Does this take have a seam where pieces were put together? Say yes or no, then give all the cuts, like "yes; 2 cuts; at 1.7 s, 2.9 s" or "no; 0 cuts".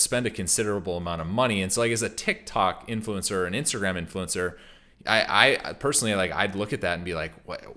no; 0 cuts